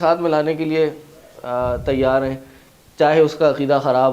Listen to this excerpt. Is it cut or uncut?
uncut